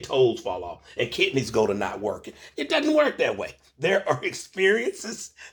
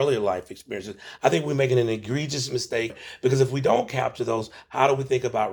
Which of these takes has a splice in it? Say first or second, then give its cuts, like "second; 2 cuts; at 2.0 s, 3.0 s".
second; 3 cuts; at 1.0 s, 3.0 s, 4.5 s